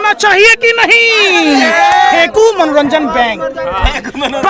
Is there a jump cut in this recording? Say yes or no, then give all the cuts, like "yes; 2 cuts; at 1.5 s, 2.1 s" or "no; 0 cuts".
yes; 1 cut; at 2.1 s